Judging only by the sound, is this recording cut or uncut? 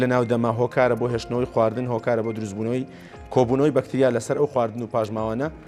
uncut